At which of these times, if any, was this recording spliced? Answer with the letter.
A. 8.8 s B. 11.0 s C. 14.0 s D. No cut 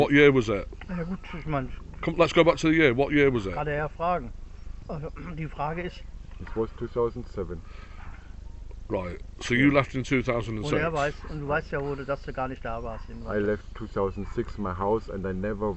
D